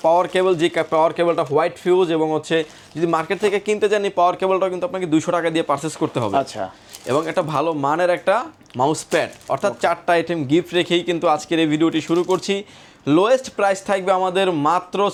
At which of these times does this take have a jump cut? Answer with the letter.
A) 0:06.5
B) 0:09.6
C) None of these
C